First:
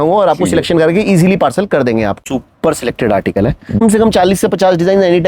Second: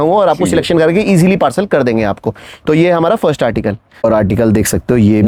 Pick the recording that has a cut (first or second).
first